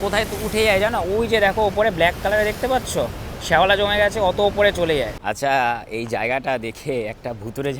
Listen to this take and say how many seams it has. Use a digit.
1